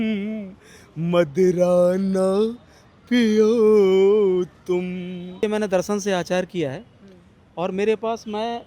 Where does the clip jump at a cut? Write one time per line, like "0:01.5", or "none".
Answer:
0:05.4